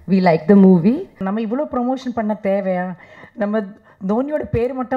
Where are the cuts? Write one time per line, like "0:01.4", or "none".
0:01.2